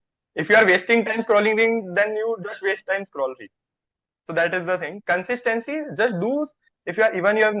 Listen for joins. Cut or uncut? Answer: uncut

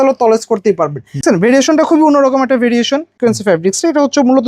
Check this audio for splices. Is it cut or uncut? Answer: cut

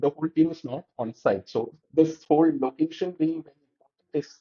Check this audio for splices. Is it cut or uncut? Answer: uncut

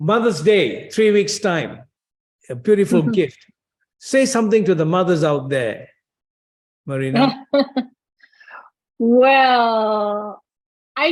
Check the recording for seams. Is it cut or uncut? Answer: uncut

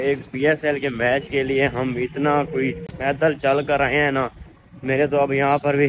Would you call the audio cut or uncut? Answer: uncut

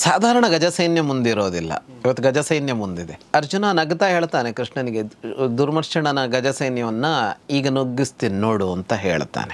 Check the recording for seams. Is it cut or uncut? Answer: cut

